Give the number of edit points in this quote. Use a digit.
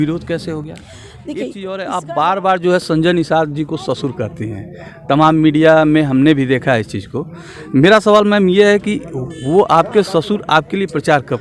1